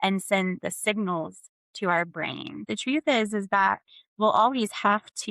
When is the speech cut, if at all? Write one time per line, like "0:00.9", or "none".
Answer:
0:02.7